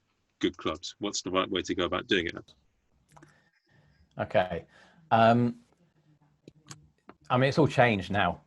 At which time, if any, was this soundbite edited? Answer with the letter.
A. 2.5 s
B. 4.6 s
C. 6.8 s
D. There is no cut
A